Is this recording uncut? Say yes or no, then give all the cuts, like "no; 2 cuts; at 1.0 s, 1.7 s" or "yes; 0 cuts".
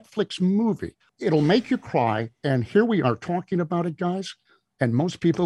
no; 1 cut; at 1.0 s